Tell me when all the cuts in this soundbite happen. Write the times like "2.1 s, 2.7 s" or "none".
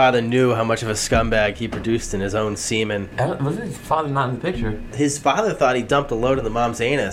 3.1 s, 4.9 s